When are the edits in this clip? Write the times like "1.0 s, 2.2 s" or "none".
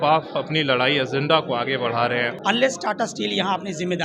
2.3 s